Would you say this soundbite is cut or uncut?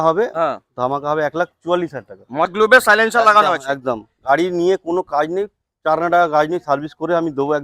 cut